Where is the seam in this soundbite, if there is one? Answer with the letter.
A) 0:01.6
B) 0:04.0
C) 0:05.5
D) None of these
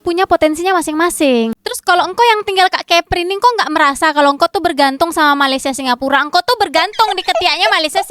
A